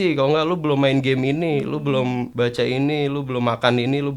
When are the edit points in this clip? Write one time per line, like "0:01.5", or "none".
0:02.3